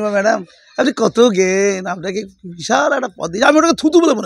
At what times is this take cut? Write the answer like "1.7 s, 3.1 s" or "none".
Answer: none